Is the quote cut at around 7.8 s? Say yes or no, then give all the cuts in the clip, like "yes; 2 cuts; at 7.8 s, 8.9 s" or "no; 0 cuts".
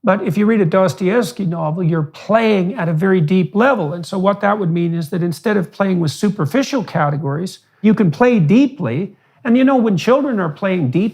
yes; 1 cut; at 7.8 s